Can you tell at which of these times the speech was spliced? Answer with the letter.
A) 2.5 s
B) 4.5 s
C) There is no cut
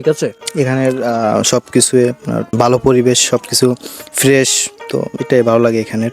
A